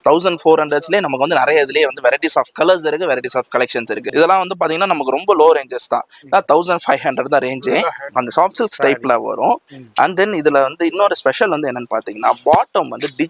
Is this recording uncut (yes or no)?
no